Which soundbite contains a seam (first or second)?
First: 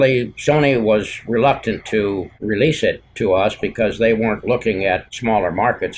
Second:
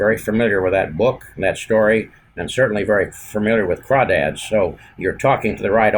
first